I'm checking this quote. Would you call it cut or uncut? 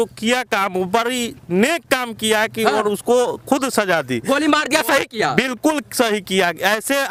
uncut